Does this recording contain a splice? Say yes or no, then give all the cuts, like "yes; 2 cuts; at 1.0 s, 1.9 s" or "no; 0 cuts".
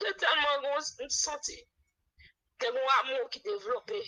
no; 0 cuts